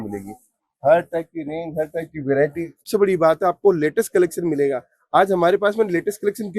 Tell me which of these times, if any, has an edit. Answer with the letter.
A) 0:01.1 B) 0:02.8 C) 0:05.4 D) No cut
B